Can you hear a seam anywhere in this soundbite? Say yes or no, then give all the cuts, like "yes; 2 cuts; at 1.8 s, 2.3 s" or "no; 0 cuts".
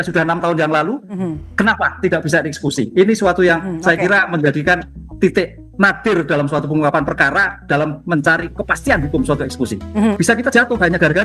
yes; 1 cut; at 10.1 s